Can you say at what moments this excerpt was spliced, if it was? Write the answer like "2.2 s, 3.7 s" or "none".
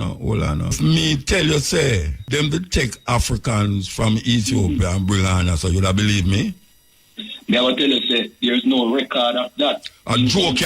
0.8 s, 2.2 s